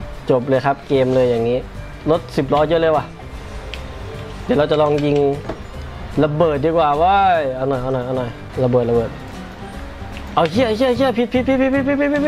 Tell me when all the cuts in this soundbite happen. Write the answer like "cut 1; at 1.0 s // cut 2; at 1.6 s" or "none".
cut 1; at 1.9 s // cut 2; at 8.4 s